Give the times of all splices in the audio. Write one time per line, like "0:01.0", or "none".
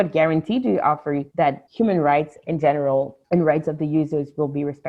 0:01.5
0:03.2